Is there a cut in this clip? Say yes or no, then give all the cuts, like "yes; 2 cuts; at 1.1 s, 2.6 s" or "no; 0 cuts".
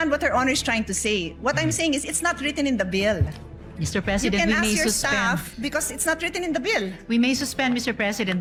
no; 0 cuts